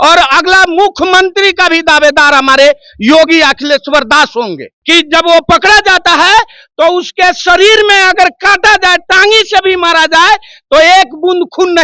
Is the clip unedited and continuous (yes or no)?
no